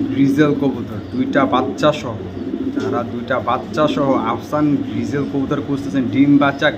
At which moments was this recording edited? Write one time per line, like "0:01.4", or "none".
none